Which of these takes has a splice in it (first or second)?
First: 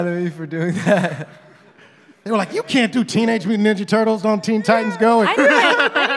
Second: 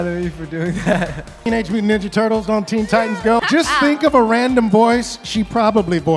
second